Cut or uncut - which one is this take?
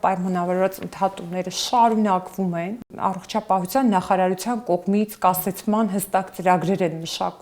cut